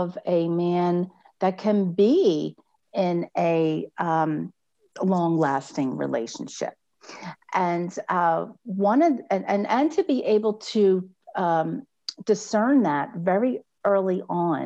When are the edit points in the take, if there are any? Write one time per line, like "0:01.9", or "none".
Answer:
none